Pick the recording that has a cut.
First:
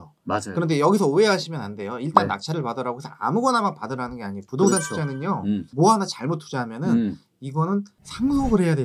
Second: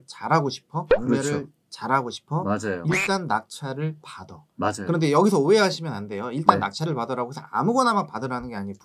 first; 1 cut; at 5.7 s

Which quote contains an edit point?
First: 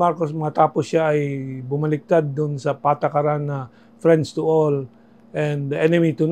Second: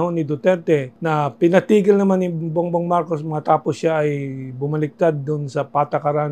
second; 1 cut; at 0.9 s

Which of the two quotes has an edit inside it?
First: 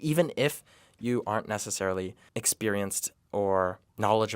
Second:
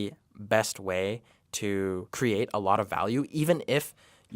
second; 1 cut; at 2.1 s

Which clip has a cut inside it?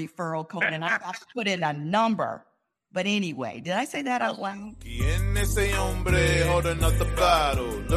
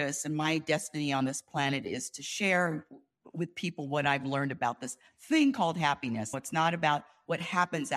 first; 1 cut; at 4.9 s

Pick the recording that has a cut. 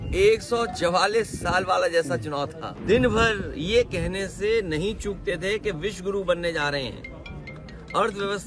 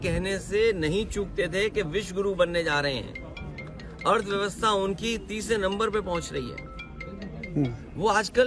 first; 1 cut; at 2.7 s

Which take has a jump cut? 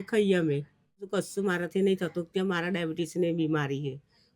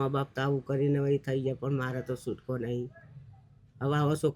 first; 1 cut; at 1.1 s

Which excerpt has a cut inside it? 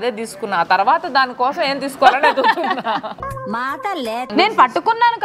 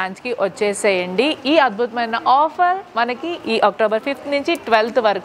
first; 1 cut; at 4.3 s

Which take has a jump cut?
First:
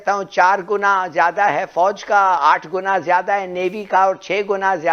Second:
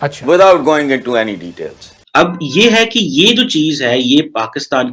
second; 1 cut; at 2.0 s

